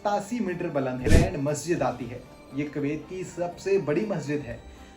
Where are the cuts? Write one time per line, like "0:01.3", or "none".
0:01.0